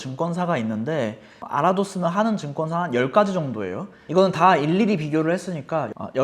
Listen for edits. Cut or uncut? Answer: cut